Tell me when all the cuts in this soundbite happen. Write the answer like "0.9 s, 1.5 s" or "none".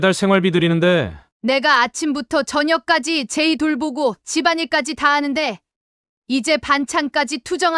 1.2 s